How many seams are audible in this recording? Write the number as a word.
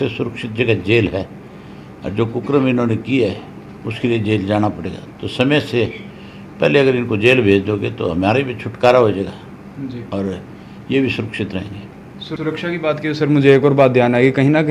zero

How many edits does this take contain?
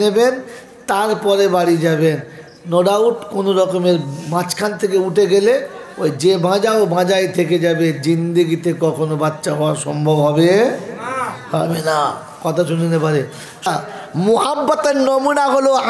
one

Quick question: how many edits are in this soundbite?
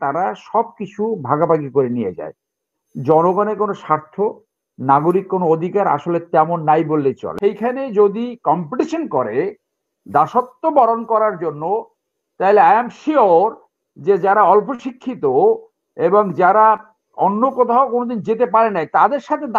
one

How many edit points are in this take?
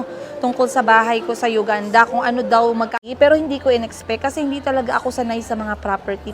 one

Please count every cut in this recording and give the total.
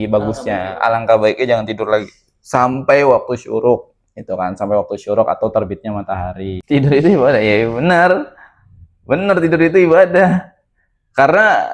one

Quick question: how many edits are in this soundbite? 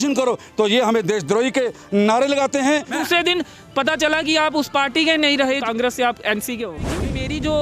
three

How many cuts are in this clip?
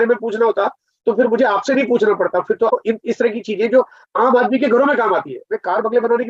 one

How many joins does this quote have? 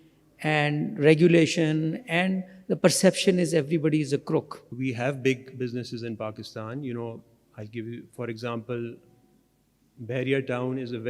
one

